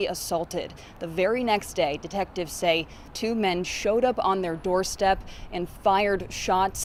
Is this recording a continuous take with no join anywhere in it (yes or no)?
yes